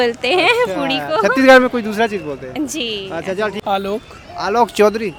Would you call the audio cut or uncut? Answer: uncut